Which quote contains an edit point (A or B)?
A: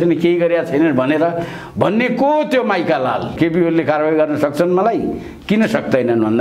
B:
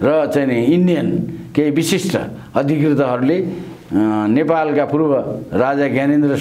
A